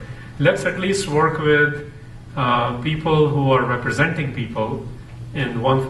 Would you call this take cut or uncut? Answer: cut